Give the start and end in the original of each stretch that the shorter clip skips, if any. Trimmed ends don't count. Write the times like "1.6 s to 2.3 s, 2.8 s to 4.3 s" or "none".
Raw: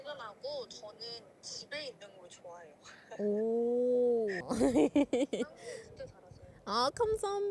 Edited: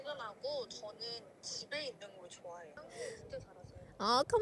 3.0 s to 5.6 s